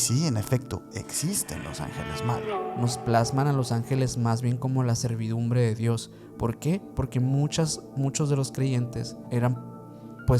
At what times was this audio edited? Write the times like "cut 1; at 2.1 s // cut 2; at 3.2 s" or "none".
cut 1; at 2.5 s // cut 2; at 9.2 s